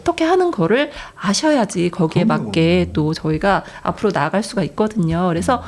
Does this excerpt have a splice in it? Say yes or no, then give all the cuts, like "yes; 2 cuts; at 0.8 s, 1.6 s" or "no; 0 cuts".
no; 0 cuts